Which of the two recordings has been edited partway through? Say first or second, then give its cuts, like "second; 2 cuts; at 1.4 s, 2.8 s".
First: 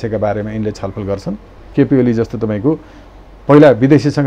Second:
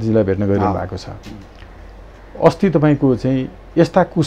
first; 1 cut; at 1.7 s